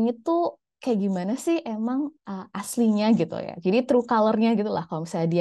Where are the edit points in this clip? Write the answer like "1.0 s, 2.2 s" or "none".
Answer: none